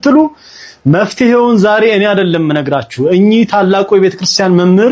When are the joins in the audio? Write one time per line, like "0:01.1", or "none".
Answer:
none